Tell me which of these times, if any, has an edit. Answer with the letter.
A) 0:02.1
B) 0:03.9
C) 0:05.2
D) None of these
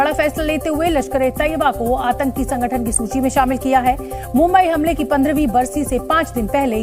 D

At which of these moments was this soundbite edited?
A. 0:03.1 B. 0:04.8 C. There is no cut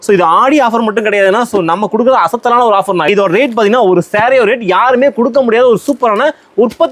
A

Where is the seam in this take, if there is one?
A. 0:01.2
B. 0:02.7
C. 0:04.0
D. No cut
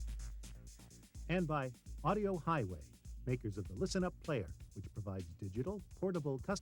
A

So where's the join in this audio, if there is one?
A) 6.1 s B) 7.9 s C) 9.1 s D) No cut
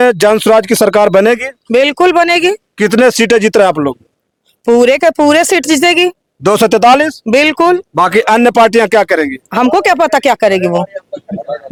D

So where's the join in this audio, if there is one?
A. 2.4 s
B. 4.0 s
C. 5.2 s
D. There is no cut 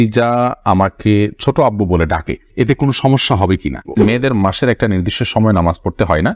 B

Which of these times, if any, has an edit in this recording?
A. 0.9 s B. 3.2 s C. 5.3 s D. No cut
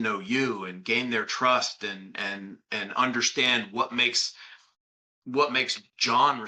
D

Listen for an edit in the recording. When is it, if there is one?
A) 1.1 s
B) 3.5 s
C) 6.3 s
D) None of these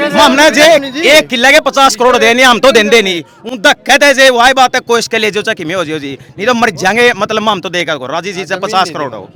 D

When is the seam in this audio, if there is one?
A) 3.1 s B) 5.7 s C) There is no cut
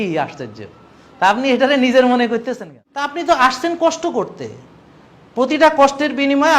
A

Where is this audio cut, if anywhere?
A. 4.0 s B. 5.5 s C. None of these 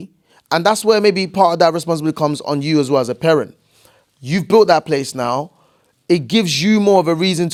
C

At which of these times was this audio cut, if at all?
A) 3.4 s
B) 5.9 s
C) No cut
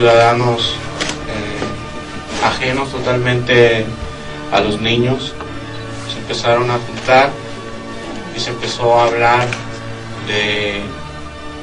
A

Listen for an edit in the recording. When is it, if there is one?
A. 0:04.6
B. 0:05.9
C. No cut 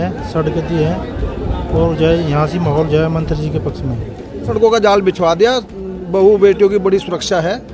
A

